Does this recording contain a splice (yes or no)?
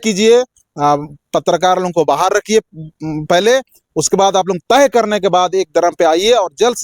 no